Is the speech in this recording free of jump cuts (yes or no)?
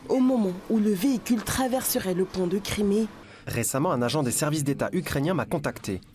no